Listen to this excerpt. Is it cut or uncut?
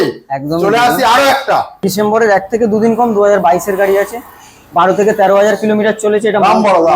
cut